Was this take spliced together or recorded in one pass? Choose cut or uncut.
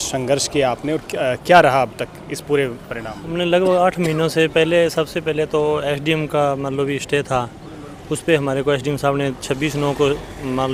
uncut